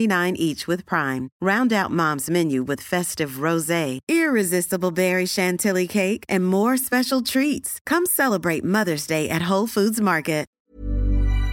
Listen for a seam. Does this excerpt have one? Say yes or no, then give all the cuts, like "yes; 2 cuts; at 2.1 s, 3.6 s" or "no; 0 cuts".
yes; 1 cut; at 10.5 s